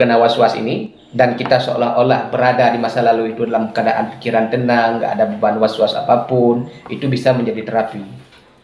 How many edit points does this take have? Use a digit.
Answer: 1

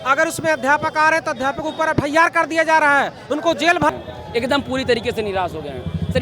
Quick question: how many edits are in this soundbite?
1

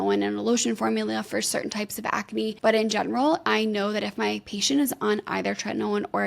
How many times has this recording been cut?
1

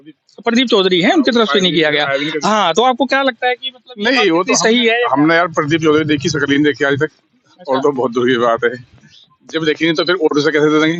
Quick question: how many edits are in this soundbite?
0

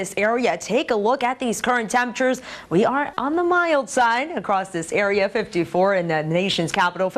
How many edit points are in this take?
0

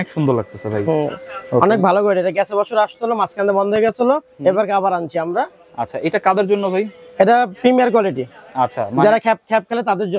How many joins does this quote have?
0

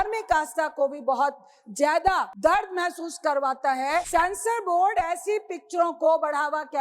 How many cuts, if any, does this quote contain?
2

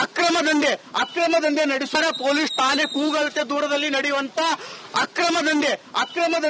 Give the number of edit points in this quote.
1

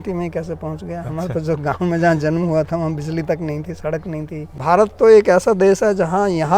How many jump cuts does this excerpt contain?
1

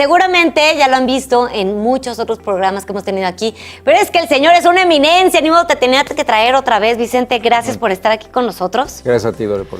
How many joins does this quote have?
0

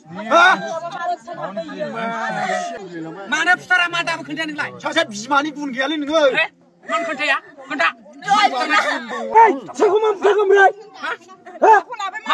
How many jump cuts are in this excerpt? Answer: 2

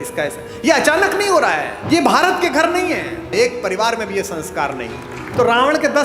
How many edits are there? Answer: 2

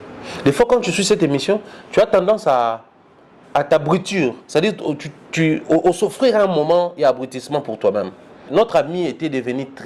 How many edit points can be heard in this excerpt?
1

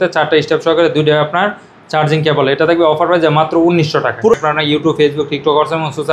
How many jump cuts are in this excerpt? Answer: 1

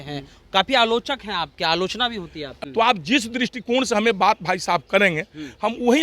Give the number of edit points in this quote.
1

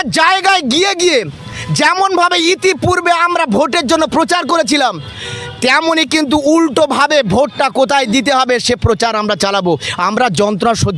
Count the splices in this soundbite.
0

